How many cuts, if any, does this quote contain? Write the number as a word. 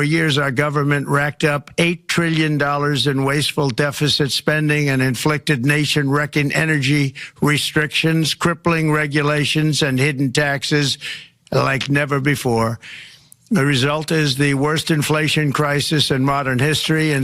zero